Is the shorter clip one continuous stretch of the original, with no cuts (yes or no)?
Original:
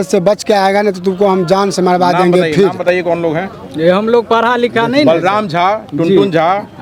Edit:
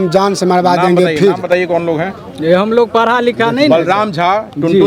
yes